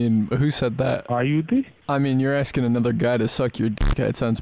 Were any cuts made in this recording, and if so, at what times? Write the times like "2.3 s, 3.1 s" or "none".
1.0 s